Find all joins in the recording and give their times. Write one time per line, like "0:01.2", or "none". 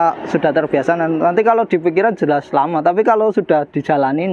none